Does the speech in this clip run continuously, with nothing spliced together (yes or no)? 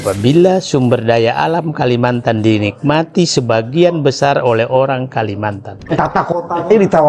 no